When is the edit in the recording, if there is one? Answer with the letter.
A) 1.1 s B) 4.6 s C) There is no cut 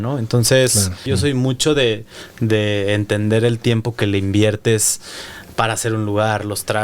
A